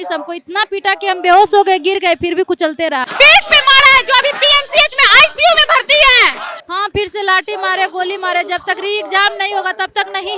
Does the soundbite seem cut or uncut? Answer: cut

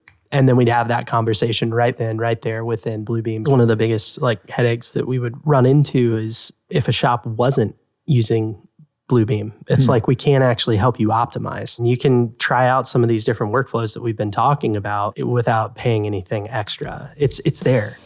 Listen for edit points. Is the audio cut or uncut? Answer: cut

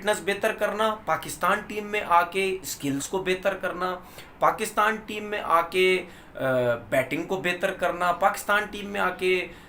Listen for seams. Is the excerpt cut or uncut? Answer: uncut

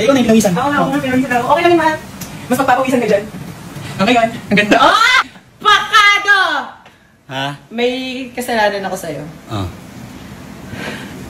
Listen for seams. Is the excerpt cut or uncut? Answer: uncut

